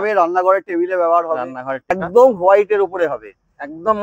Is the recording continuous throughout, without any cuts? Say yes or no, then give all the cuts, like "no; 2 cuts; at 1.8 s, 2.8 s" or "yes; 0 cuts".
no; 1 cut; at 2.0 s